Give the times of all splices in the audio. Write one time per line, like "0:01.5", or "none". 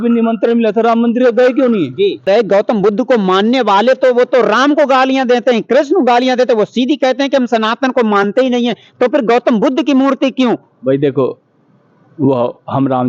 0:02.2

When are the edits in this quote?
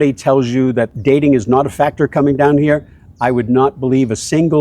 0:00.9

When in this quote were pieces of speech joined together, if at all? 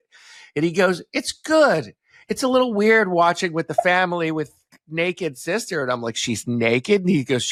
none

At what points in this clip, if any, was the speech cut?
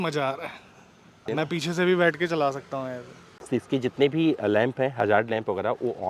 0:01.2
0:03.3

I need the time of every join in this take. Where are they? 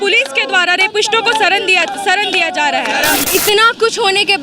0:03.3

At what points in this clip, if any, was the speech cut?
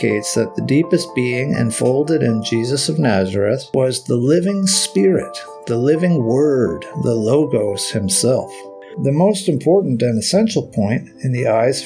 0:03.7
0:08.8

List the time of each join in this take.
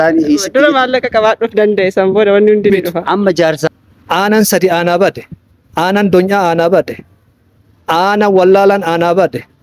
0:03.7

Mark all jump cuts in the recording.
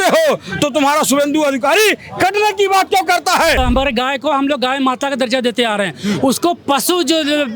0:03.6

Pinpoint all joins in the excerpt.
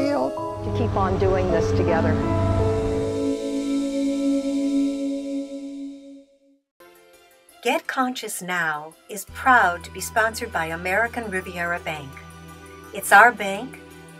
0:07.6

